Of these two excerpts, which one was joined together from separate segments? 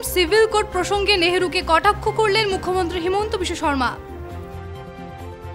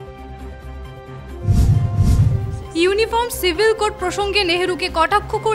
second; 1 cut; at 2.3 s

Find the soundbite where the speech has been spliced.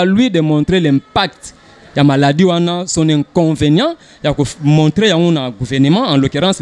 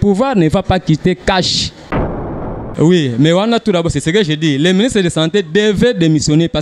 second; 1 cut; at 2.2 s

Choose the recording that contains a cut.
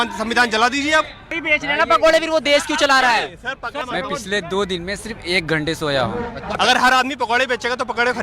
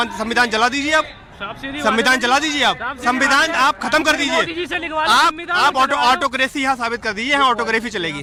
first; 3 cuts; at 1.4 s, 3.8 s, 6.6 s

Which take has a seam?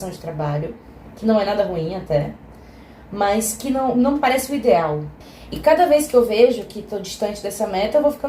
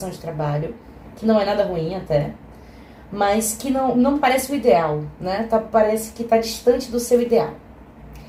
first; 1 cut; at 5.1 s

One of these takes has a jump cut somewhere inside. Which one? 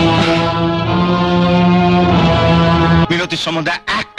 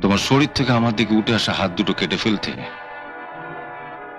first; 1 cut; at 3.0 s

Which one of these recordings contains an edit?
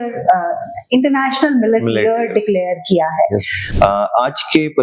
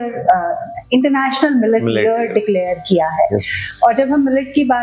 first; 1 cut; at 3.6 s

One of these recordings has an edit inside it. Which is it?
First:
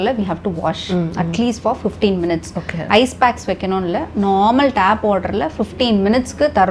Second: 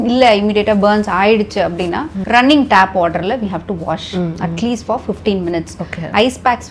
second; 1 cut; at 2.2 s

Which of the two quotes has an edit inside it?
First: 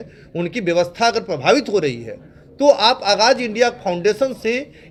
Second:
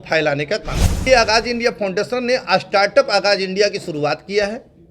second; 1 cut; at 1.0 s

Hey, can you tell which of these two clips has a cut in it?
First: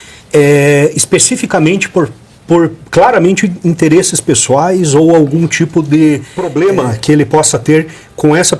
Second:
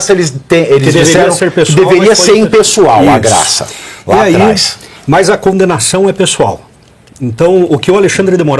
first; 1 cut; at 6.4 s

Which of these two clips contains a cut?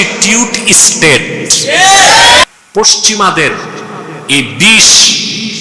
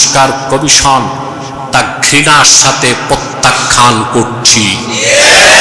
first; 1 cut; at 2.4 s

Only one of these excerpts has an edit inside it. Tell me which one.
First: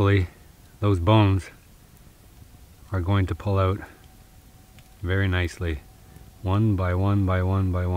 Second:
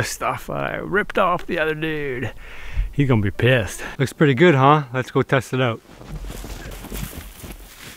second; 2 cuts; at 3.8 s, 6.8 s

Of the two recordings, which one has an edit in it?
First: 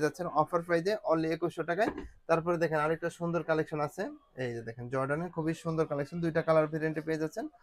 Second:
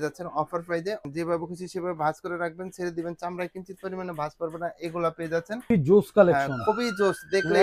second; 2 cuts; at 1.0 s, 5.7 s

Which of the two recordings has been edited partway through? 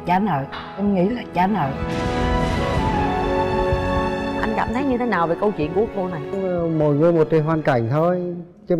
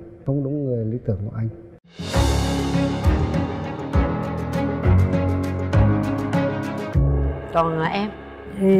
first; 1 cut; at 4.5 s

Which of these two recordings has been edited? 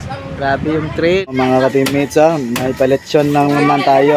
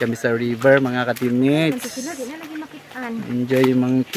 first; 1 cut; at 1.2 s

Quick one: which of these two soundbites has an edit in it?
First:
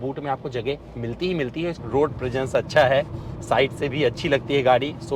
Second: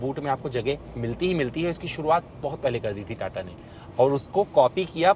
first; 1 cut; at 1.8 s

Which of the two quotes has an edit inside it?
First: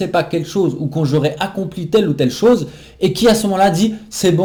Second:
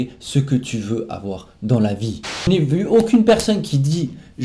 second; 1 cut; at 2.5 s

